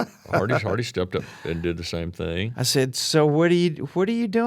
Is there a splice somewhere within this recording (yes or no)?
yes